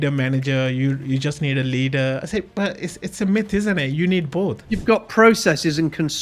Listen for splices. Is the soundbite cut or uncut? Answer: cut